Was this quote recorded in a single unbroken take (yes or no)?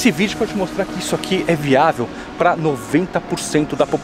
yes